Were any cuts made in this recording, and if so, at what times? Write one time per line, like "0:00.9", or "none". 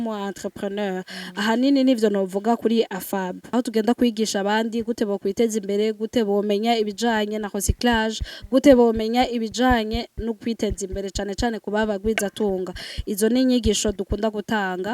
0:03.4